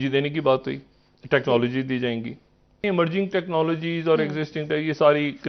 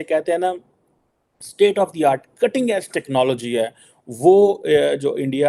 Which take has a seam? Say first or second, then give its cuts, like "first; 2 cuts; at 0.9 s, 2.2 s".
first; 1 cut; at 2.8 s